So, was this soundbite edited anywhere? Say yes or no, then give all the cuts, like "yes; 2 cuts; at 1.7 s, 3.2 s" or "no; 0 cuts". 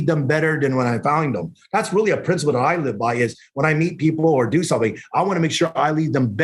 no; 0 cuts